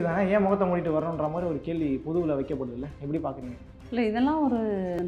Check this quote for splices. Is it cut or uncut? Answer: uncut